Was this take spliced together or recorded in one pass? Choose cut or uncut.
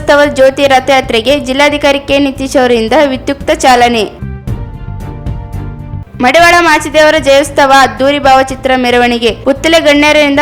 cut